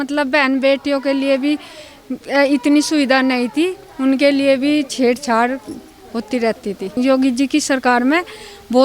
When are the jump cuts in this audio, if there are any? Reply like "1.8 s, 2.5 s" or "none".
6.9 s